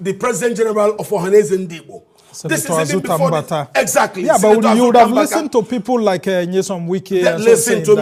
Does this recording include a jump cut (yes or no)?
no